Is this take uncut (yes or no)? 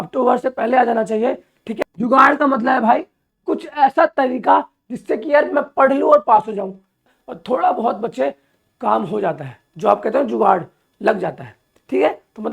no